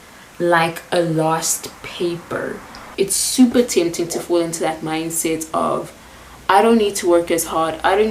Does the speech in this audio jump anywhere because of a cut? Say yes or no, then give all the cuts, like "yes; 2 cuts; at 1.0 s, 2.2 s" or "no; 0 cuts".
yes; 1 cut; at 2.9 s